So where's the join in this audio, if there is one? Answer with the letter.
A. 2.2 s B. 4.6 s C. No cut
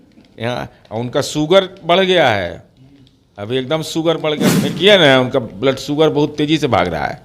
B